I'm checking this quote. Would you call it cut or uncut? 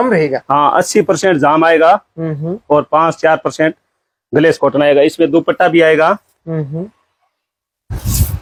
uncut